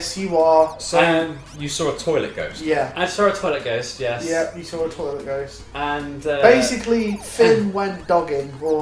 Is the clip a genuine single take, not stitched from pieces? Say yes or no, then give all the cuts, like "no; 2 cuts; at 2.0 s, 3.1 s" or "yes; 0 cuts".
yes; 0 cuts